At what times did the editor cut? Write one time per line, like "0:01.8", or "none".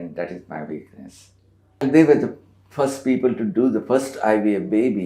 0:01.8